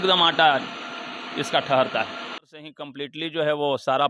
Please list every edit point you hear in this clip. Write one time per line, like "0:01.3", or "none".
0:02.5